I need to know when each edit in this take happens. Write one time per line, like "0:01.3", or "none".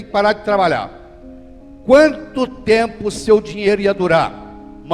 none